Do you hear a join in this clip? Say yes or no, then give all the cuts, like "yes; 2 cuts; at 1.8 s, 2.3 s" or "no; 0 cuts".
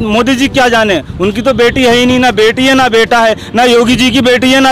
no; 0 cuts